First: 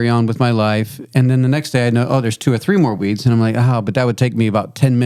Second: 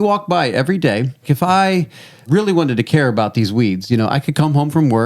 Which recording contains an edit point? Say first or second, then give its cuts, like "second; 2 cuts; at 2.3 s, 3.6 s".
second; 2 cuts; at 1.2 s, 2.3 s